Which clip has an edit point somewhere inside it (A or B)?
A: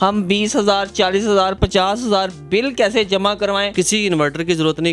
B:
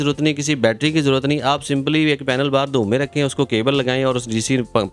A